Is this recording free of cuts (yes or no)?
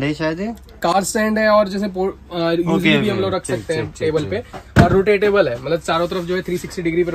yes